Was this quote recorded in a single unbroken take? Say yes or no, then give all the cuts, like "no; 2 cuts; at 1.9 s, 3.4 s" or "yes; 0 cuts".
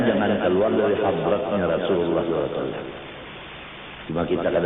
yes; 0 cuts